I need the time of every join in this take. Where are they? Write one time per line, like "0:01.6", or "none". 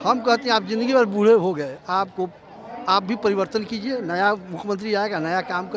none